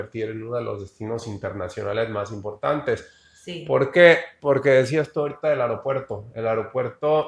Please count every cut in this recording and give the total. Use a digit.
0